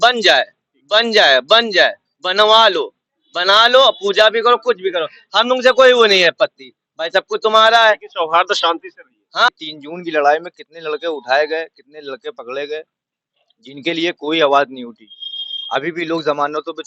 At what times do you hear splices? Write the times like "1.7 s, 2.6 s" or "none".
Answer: 9.5 s